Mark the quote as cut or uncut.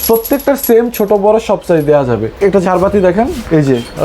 cut